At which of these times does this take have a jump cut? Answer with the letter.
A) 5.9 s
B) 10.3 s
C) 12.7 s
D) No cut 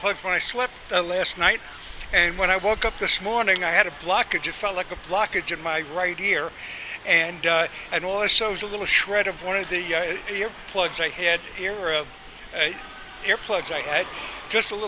B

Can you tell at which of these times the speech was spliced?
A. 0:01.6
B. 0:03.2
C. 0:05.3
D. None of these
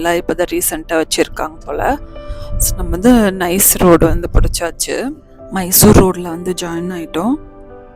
C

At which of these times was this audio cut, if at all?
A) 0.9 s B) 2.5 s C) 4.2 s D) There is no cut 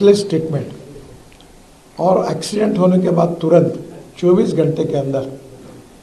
D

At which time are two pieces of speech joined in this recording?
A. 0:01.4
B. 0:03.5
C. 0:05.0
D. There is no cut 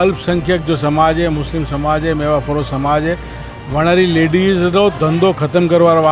D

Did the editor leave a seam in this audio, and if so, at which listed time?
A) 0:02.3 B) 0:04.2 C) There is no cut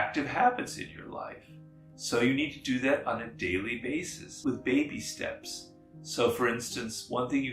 B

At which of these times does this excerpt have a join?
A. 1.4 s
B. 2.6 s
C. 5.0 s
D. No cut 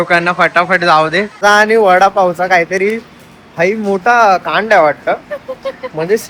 A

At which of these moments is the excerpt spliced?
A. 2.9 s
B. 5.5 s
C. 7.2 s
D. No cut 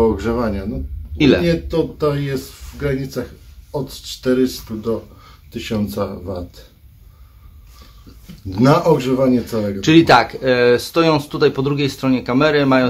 D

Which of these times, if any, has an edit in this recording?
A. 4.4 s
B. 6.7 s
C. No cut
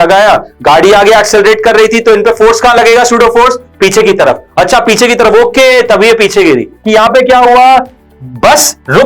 B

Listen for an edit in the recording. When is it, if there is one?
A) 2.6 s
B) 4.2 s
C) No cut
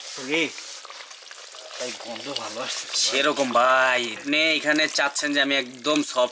B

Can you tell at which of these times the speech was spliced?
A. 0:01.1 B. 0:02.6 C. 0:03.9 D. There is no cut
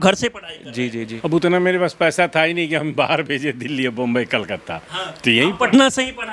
A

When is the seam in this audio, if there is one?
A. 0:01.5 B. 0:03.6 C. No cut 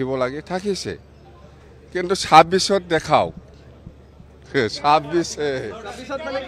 C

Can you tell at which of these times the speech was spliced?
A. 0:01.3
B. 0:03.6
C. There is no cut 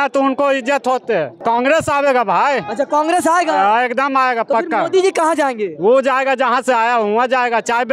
A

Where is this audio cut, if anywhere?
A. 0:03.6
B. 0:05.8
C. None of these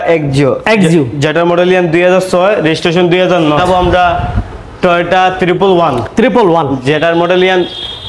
A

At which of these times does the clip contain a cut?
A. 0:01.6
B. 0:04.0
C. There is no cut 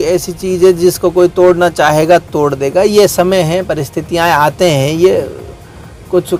C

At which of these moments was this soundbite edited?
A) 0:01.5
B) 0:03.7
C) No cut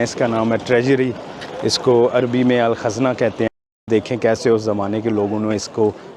B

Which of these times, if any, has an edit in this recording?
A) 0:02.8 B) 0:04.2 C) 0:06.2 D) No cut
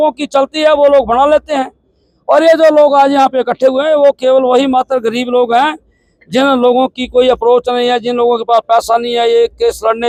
D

